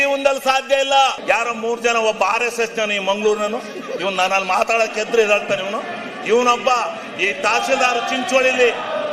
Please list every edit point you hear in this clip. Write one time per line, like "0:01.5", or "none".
0:01.2